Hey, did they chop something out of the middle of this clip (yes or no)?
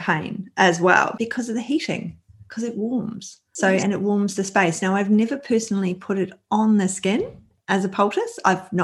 no